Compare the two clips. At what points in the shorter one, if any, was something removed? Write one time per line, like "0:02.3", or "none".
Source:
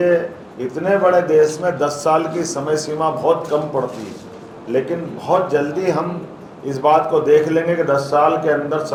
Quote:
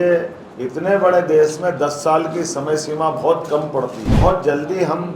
0:04.1